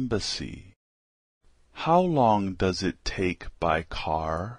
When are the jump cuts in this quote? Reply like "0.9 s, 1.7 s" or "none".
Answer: 2.8 s